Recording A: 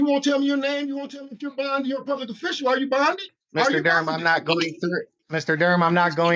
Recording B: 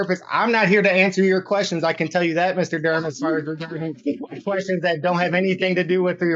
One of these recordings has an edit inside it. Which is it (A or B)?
A